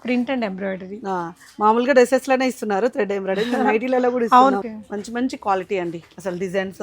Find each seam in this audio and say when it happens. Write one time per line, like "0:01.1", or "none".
0:04.6

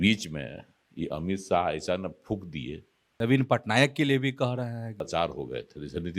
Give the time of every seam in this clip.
0:03.1
0:04.9

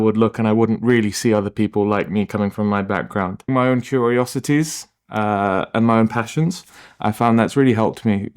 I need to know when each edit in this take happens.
0:03.5

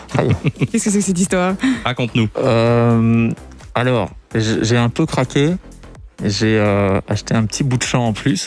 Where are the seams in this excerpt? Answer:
none

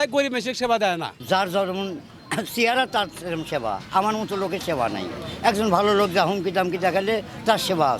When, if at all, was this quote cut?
none

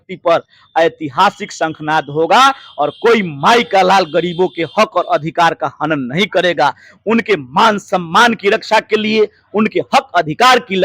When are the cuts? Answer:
none

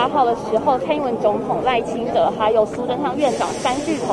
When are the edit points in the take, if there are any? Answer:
none

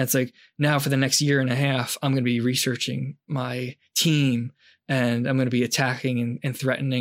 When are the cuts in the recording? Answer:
none

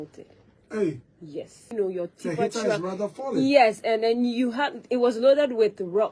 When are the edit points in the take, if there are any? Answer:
0:01.6

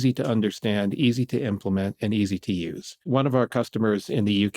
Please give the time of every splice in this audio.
0:03.1

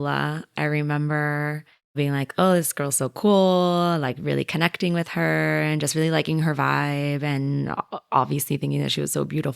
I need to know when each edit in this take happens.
0:02.0

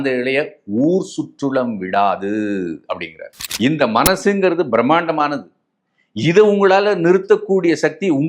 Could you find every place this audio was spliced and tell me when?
0:03.4

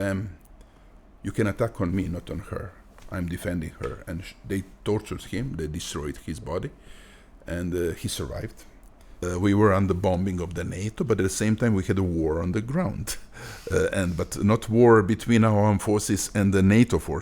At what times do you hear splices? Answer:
0:09.2

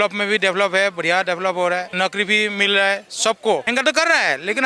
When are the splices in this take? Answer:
0:01.9
0:03.7

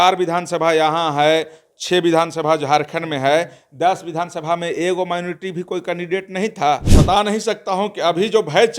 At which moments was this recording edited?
0:06.9

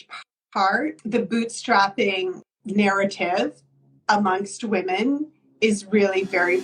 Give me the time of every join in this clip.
0:01.0
0:02.4

